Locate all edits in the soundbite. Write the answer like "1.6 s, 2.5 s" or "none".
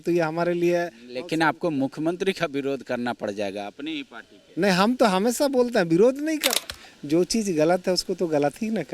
6.5 s